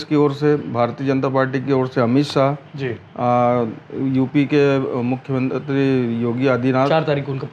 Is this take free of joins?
yes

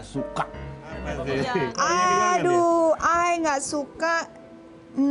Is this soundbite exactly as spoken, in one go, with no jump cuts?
no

